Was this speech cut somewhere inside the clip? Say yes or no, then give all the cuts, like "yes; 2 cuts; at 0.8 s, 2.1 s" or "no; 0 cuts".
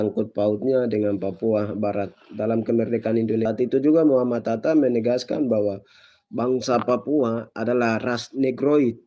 yes; 1 cut; at 3.4 s